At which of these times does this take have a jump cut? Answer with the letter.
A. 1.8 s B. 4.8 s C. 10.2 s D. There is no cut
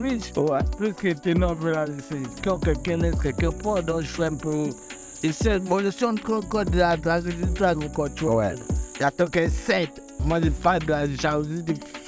C